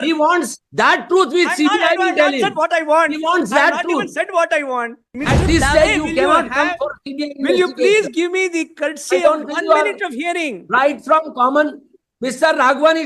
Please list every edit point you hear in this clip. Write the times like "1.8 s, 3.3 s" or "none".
5.1 s